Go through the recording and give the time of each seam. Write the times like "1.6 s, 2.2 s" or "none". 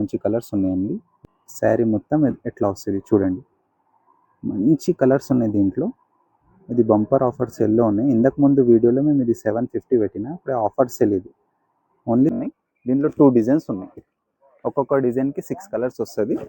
1.1 s, 12.4 s